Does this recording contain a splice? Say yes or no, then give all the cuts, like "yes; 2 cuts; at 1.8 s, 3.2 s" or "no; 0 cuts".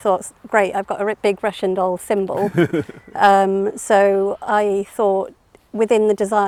no; 0 cuts